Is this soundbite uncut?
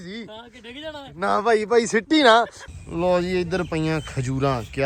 no; 1 cut; at 2.6 s

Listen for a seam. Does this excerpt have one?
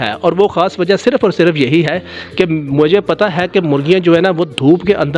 no; 0 cuts

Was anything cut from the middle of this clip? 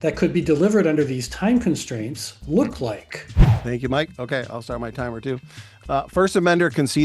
yes; 1 cut; at 3.5 s

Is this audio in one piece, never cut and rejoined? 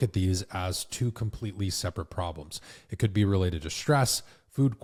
yes; 0 cuts

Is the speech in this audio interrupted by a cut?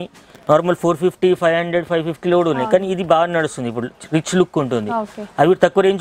no; 0 cuts

